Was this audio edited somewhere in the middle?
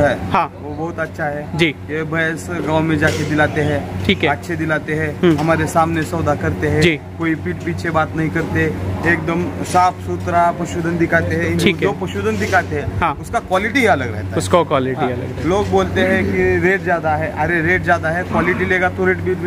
no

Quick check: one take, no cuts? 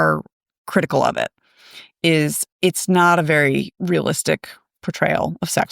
no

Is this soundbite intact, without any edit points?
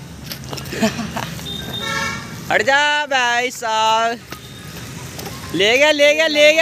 yes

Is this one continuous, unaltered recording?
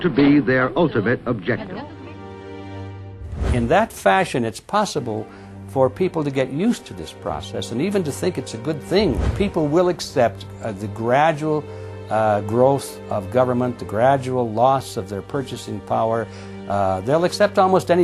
no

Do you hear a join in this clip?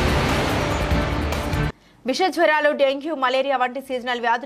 yes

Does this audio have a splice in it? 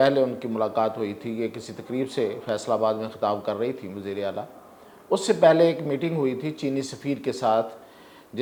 no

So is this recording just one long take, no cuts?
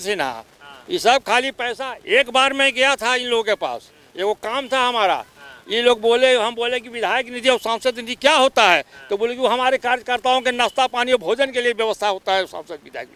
yes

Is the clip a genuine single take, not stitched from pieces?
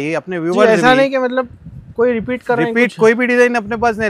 yes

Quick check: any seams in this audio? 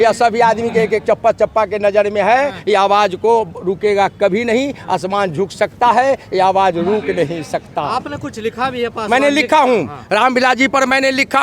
no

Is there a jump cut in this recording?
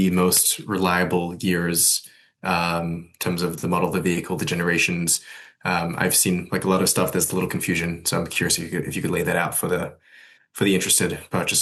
no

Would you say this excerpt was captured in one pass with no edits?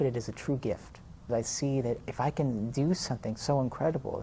no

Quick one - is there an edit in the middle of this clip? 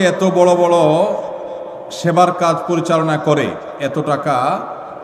no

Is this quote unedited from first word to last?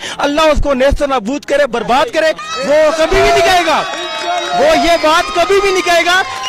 no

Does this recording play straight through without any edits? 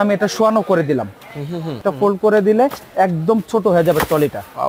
no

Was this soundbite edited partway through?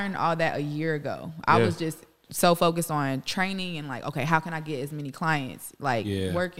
no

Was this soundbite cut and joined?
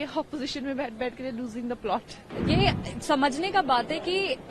yes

